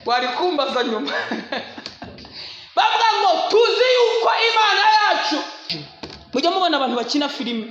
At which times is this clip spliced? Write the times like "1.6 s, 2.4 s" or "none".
5.7 s

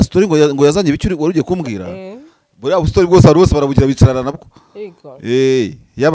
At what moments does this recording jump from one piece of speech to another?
none

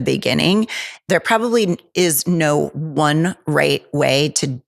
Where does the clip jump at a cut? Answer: 1.0 s

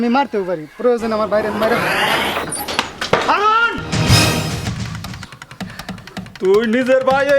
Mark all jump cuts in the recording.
2.1 s

